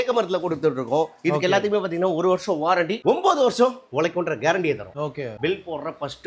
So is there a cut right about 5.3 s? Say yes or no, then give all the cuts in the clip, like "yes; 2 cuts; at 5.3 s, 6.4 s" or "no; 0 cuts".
yes; 1 cut; at 5.3 s